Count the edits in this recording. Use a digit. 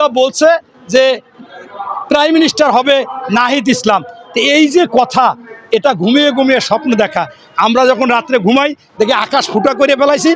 0